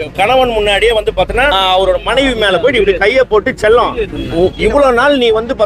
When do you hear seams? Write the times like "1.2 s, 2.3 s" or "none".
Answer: 1.5 s